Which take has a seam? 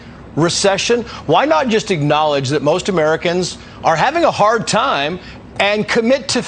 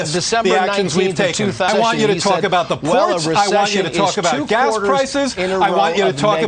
second; 1 cut; at 1.7 s

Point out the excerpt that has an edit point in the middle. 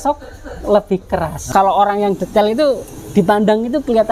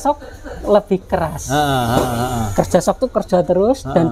first; 1 cut; at 1.5 s

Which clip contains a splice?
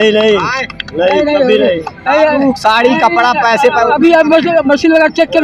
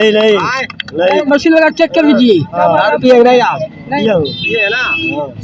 second; 3 cuts; at 1.2 s, 2.5 s, 4.0 s

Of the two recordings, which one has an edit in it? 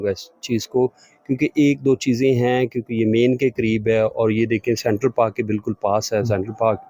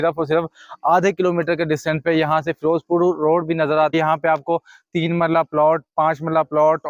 second; 1 cut; at 3.9 s

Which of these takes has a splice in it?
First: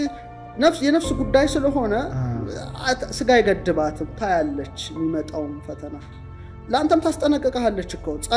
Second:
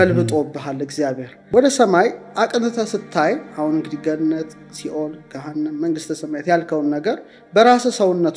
second; 1 cut; at 1.3 s

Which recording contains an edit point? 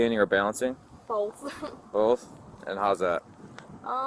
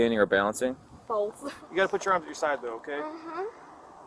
second; 1 cut; at 1.6 s

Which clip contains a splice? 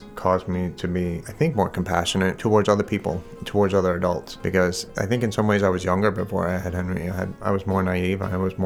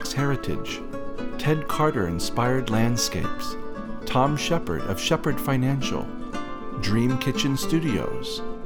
first; 5 cuts; at 1.2 s, 2.4 s, 4.3 s, 4.9 s, 7.3 s

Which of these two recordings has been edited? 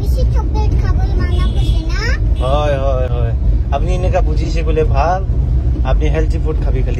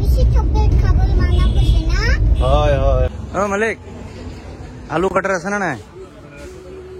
second; 1 cut; at 3.1 s

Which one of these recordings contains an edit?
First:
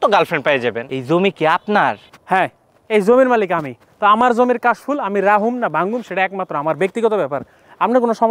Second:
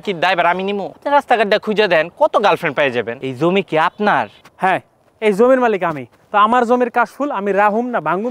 second; 1 cut; at 0.9 s

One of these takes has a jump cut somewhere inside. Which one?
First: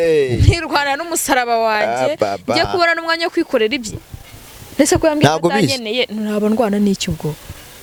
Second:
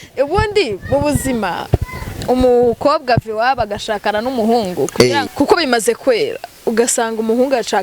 second; 1 cut; at 5.3 s

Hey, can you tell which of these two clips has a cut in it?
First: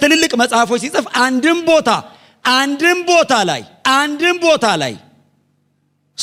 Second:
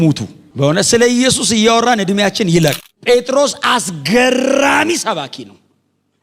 second; 1 cut; at 2.9 s

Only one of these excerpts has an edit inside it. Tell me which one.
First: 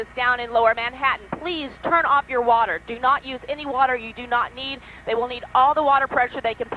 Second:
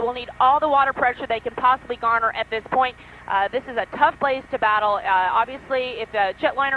second; 1 cut; at 4.9 s

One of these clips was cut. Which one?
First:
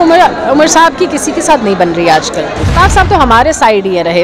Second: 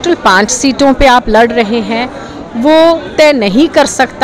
first; 1 cut; at 2.6 s

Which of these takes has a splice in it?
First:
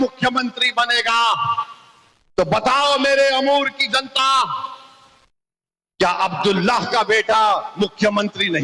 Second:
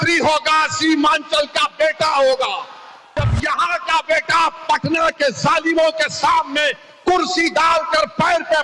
second; 1 cut; at 3.3 s

